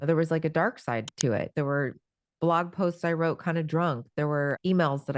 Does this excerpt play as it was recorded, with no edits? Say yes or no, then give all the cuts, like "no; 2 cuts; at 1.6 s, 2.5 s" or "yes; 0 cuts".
no; 1 cut; at 1.5 s